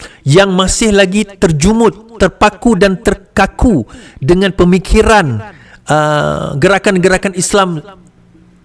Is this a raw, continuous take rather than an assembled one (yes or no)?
yes